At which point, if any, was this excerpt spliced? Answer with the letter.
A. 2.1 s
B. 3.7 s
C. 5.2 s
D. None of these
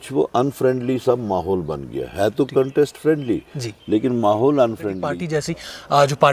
C